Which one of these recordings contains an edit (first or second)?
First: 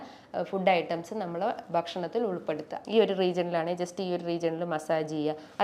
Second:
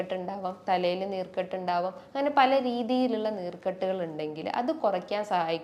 first